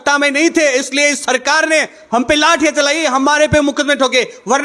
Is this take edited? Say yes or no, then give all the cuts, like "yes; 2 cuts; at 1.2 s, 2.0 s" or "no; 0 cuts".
no; 0 cuts